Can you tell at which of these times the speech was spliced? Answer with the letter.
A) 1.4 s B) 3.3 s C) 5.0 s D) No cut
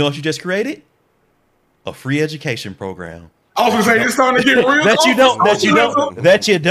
D